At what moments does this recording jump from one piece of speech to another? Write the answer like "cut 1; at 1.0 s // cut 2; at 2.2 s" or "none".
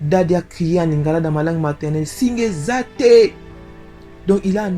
none